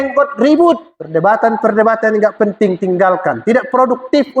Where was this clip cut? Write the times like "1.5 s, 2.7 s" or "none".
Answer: 0.9 s